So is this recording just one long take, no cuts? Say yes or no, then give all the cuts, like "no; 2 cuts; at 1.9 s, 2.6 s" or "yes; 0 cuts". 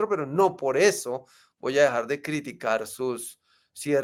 yes; 0 cuts